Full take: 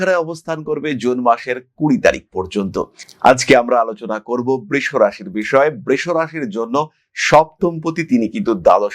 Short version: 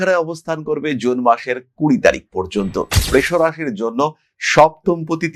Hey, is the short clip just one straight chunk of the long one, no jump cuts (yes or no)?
no